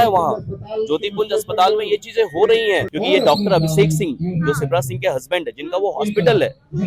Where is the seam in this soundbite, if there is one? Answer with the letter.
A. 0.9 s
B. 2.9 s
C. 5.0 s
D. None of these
B